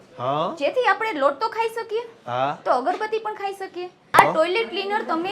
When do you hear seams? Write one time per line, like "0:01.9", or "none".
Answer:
0:04.2